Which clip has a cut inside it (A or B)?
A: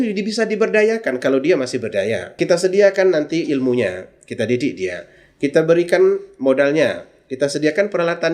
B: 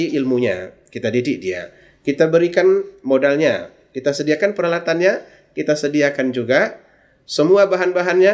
A